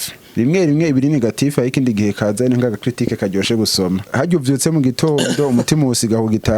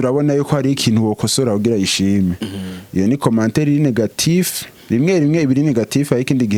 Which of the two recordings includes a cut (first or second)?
first